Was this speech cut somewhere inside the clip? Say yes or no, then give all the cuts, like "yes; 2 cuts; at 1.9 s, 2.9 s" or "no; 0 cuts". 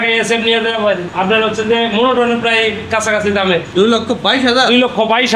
no; 0 cuts